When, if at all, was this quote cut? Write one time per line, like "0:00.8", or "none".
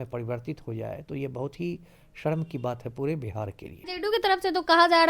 0:03.8